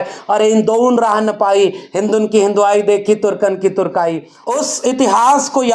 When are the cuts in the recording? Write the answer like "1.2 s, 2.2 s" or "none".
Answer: 4.3 s